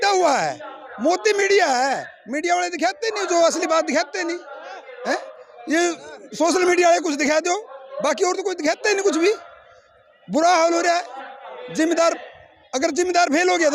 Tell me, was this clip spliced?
no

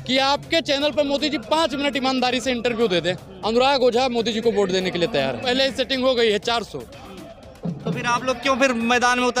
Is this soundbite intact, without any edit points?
no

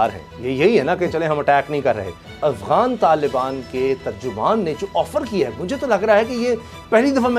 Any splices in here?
yes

